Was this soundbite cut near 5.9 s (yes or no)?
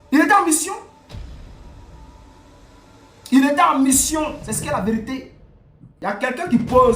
yes